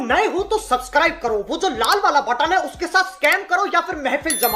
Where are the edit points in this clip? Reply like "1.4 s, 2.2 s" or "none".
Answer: none